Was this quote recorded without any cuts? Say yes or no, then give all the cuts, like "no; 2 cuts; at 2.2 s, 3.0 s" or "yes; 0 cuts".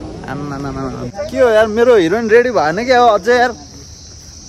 no; 1 cut; at 1.1 s